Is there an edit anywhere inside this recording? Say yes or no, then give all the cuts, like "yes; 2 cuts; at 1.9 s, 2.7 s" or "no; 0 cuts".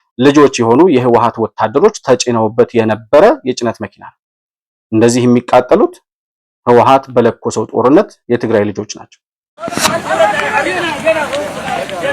yes; 1 cut; at 9.7 s